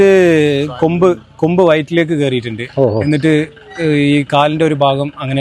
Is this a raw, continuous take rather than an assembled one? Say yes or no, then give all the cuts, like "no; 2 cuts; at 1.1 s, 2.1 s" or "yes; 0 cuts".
yes; 0 cuts